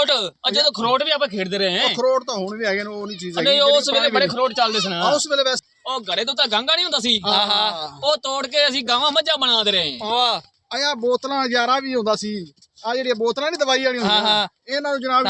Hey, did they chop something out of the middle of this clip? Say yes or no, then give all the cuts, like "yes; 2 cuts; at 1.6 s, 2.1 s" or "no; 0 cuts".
yes; 1 cut; at 5.6 s